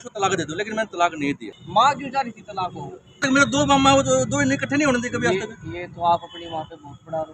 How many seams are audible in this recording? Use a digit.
2